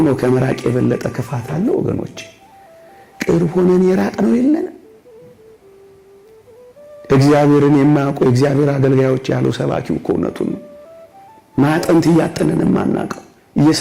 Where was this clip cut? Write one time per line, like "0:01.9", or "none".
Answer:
0:04.8
0:06.6